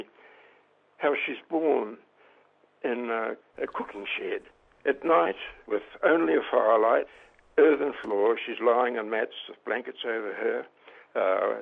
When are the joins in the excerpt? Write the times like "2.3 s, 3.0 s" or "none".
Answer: 3.5 s, 5.5 s, 7.1 s